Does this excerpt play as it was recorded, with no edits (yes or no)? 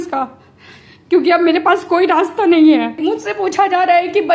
no